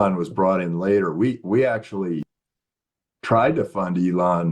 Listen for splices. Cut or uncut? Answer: cut